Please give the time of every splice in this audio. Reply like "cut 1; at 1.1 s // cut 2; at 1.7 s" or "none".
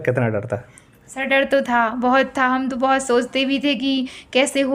none